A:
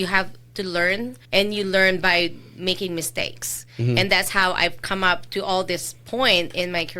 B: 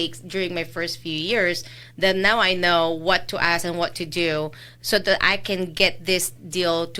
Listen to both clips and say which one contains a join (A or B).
A